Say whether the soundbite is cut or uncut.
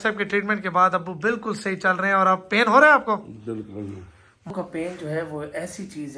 cut